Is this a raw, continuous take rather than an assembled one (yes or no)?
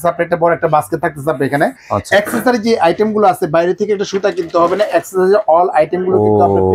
yes